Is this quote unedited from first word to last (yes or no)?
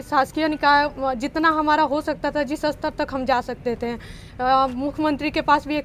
yes